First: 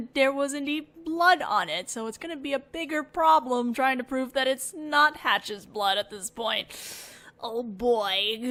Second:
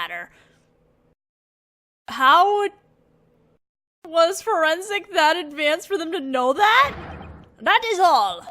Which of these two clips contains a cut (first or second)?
second